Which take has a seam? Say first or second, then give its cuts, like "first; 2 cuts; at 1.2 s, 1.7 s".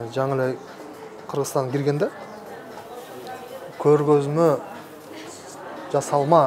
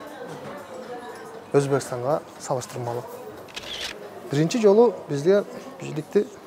second; 1 cut; at 3.8 s